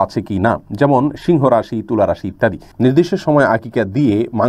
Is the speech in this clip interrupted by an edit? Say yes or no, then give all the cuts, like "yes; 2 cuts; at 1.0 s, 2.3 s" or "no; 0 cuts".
yes; 1 cut; at 2.6 s